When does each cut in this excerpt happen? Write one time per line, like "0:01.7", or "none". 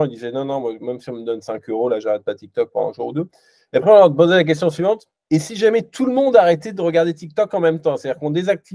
0:05.1

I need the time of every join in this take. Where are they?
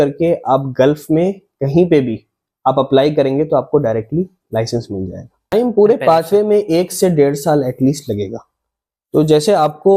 0:05.5

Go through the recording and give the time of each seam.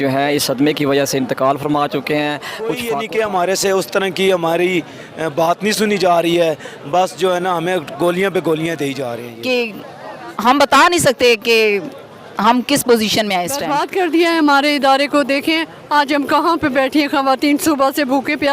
0:02.8
0:09.2
0:13.8

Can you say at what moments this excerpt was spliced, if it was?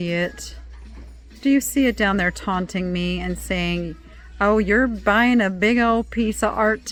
none

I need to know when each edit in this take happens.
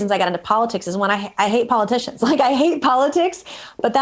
none

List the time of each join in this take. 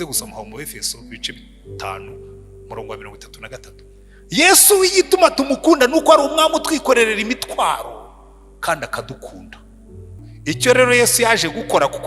0:10.2

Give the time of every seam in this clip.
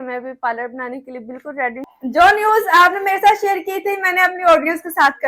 0:01.8

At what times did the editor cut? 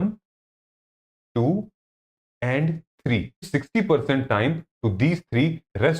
0:03.5

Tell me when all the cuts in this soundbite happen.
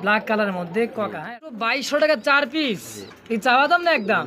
0:01.8

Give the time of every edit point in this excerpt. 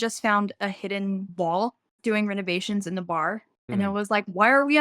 0:01.3
0:03.6

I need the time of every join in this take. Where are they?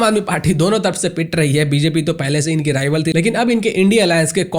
0:03.1

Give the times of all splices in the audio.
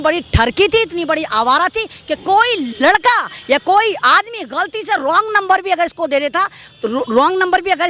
none

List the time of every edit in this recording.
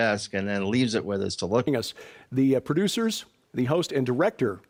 none

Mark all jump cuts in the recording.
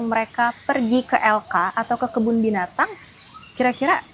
none

